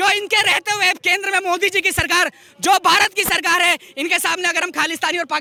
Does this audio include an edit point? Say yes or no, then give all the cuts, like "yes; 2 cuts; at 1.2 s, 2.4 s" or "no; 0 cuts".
no; 0 cuts